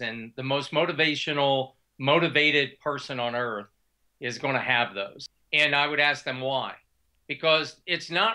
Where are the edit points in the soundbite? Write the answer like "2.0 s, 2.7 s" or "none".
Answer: 5.2 s

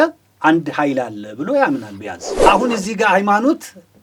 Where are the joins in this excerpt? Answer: 2.4 s

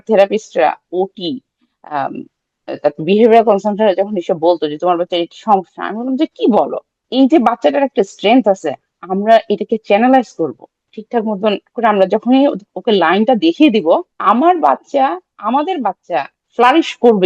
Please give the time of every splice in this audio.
7.0 s, 11.0 s, 14.1 s, 16.4 s

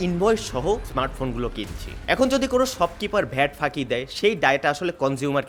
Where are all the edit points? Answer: none

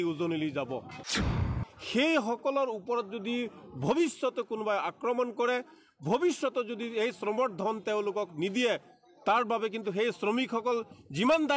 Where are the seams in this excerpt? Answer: 1.2 s

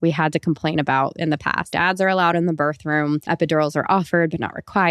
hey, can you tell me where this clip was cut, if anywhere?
1.7 s, 3.2 s

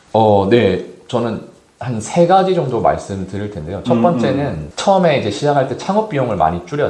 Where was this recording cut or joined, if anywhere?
none

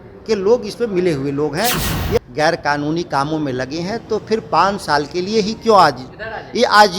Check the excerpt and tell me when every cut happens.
2.2 s

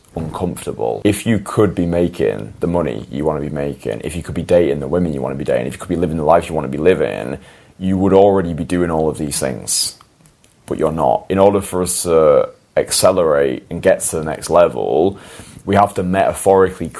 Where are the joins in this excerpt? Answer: 1.0 s, 11.3 s

